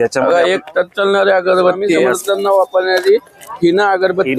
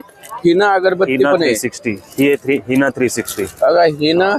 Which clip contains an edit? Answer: first; 1 cut; at 2.1 s

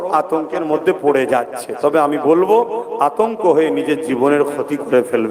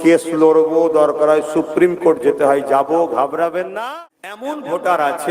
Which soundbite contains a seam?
second; 1 cut; at 3.7 s

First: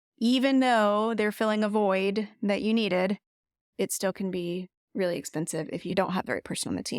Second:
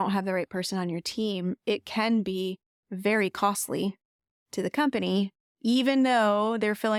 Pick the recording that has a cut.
first; 1 cut; at 5.9 s

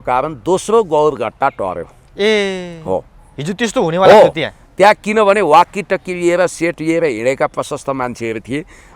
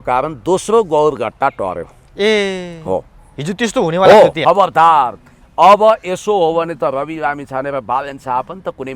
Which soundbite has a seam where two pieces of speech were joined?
second; 1 cut; at 4.4 s

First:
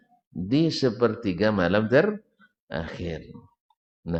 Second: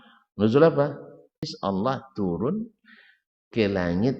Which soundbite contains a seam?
second; 1 cut; at 1.5 s

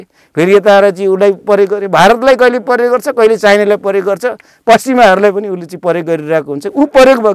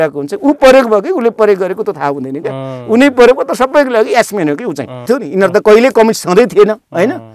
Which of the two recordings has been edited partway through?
second; 1 cut; at 5.1 s

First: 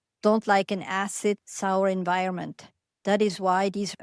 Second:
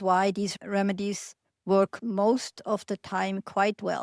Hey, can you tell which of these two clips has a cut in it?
first; 1 cut; at 1.5 s

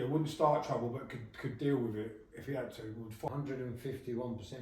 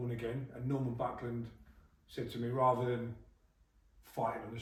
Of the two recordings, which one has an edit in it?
first; 1 cut; at 3.3 s

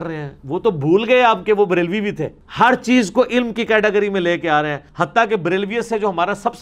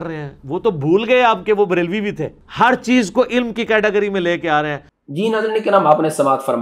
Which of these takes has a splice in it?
first; 1 cut; at 4.8 s

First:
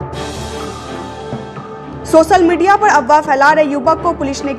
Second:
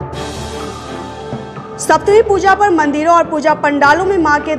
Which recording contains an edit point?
first; 1 cut; at 1.6 s

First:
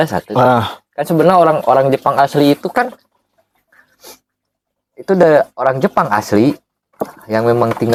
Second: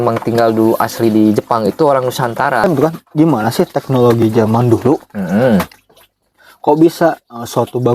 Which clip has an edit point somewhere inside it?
second; 1 cut; at 2.6 s

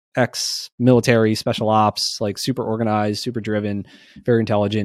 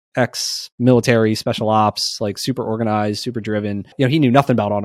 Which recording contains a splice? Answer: second; 1 cut; at 3.9 s

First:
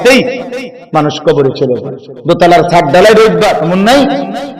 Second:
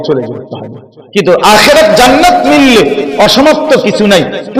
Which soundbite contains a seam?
first; 1 cut; at 3.7 s

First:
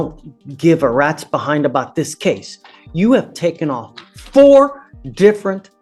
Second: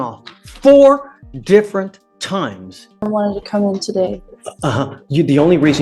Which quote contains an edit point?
second; 1 cut; at 3.0 s

